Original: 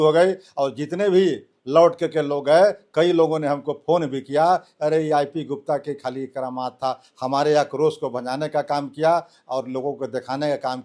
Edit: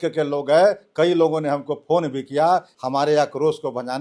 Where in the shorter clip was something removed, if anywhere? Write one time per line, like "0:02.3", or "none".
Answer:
0:02.7